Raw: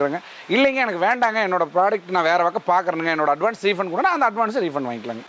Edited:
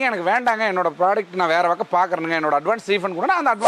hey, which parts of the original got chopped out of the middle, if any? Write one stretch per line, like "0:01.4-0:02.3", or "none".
none

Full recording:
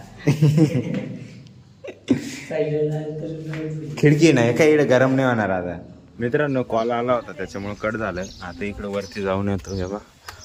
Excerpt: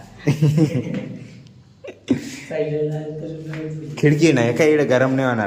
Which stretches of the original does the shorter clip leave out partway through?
none

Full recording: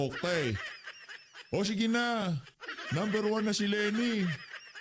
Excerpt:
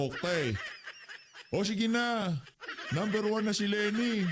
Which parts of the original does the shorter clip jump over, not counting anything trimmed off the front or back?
none

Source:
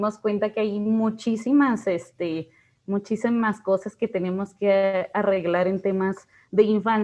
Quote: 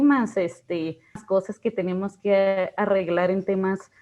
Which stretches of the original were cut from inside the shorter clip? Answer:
0:02.7-0:03.6

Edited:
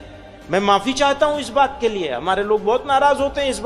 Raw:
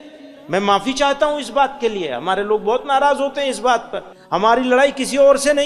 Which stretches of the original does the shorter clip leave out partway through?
none

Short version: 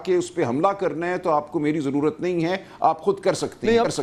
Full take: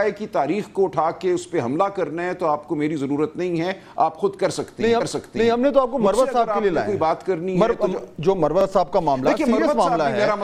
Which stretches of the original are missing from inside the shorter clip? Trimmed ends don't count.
none

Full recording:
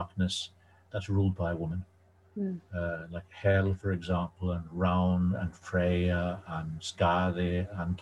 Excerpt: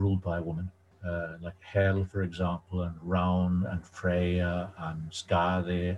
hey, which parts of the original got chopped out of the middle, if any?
0:02.1-0:02.6

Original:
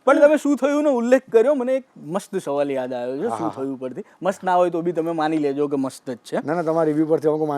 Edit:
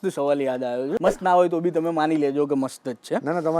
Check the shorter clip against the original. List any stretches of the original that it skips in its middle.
0:03.3-0:04.2

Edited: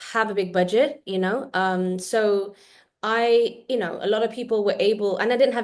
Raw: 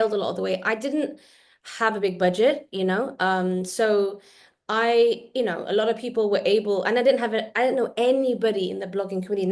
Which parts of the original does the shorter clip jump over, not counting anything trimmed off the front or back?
none

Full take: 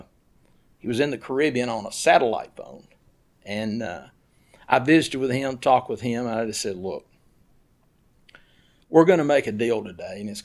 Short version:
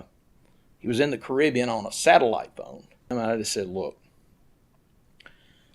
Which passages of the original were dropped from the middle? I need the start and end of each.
0:03.1-0:06.2

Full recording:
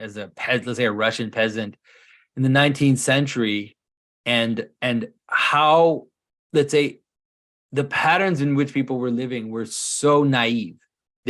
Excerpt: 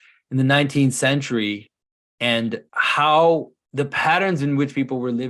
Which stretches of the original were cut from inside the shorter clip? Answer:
0:04.7-0:05.2
0:06.1-0:07.6

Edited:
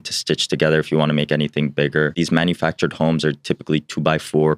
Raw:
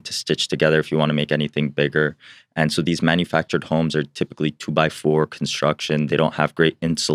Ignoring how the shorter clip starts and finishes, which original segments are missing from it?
0:02.2-0:02.9

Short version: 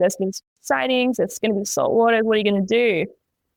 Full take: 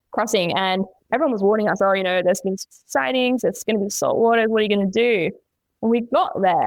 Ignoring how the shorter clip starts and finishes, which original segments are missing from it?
none

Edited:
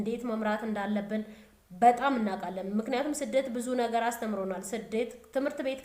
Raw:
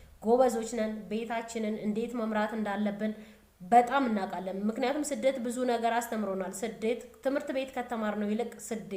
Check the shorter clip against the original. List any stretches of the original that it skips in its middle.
none

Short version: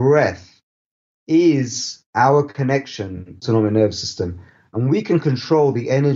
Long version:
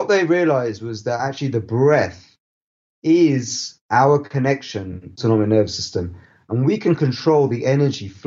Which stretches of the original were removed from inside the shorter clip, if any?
none

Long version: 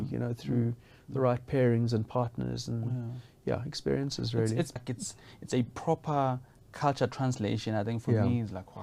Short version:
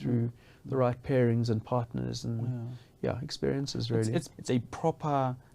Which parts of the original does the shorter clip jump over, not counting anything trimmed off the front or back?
0:04.8-0:05.4

